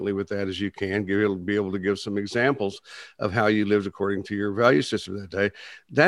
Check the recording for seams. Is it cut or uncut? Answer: uncut